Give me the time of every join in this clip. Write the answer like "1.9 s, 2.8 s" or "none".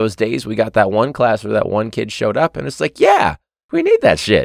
3.5 s